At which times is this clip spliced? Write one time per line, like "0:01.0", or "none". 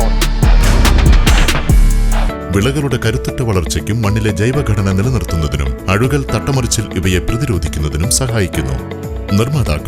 0:02.3